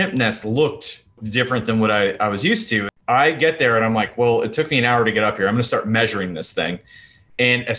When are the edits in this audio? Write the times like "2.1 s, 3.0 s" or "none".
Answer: 1.2 s, 2.9 s